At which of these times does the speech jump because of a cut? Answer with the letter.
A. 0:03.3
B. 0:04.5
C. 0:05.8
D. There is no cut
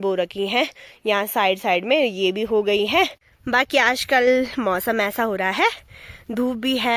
A